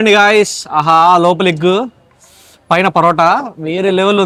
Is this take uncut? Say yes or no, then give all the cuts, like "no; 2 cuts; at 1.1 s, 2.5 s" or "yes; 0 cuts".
yes; 0 cuts